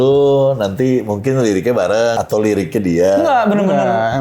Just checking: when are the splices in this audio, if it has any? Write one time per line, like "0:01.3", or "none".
0:02.2